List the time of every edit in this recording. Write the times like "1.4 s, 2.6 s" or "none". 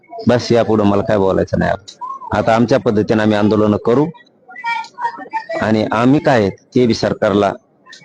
none

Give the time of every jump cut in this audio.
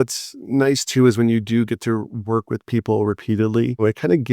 2.1 s

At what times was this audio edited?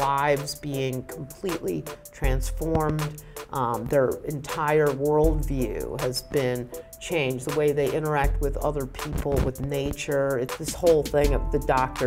10.6 s

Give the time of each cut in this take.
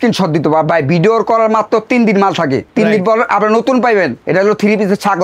2.7 s, 4.2 s

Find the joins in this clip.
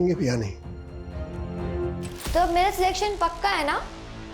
2.0 s

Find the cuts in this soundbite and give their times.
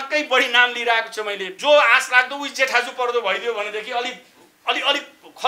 1.5 s

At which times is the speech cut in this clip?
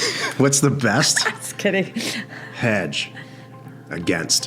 none

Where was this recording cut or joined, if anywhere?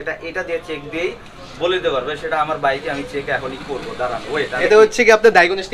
4.5 s

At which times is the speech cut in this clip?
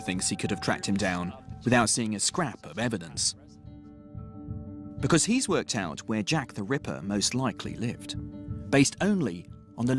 1.3 s

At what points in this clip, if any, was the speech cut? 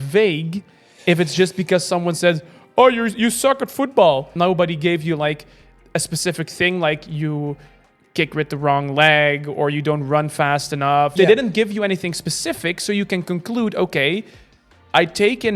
4.3 s, 11.1 s

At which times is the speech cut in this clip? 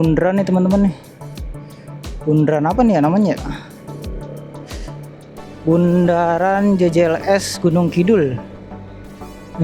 none

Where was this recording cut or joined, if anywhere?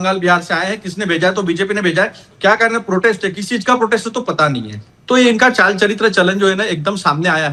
none

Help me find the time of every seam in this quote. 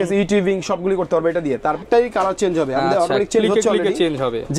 1.8 s

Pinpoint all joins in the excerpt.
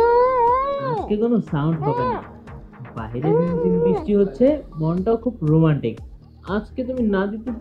none

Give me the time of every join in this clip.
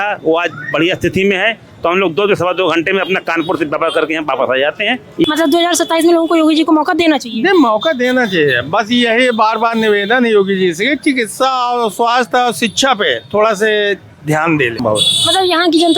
5.3 s, 14.8 s

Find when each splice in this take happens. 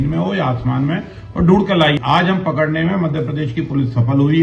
2.0 s

